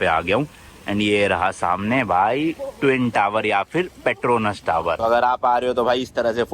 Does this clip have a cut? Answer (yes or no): yes